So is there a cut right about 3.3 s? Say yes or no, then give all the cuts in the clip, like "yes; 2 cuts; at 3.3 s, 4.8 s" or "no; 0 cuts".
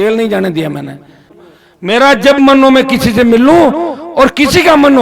no; 1 cut; at 1.3 s